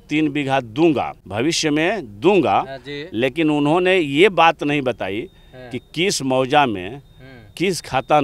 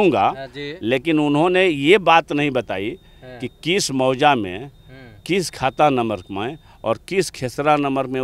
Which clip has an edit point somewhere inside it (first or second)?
first